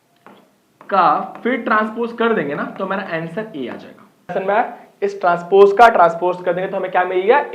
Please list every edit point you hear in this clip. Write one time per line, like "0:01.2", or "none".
0:04.3